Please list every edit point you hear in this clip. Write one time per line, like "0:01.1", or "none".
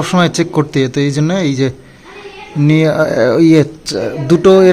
none